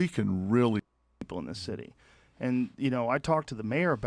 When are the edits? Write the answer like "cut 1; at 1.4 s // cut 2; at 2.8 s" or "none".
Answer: cut 1; at 1.0 s